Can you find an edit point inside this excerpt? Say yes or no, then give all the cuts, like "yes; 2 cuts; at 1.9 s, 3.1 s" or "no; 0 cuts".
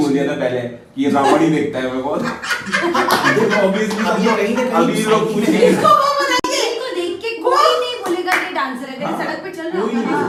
no; 0 cuts